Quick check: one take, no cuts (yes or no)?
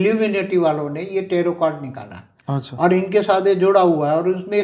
yes